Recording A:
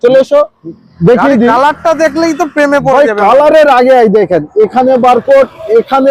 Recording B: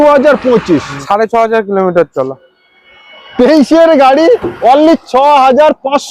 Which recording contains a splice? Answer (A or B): B